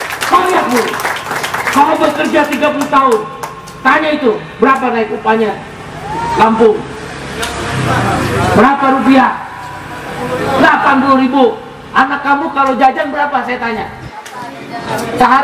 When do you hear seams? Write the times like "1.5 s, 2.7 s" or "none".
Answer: none